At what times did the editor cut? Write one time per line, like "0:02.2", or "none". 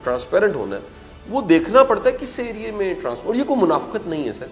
none